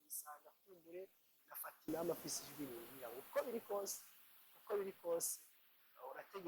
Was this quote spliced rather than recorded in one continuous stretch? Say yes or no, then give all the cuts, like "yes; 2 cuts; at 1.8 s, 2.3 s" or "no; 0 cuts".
yes; 1 cut; at 1.8 s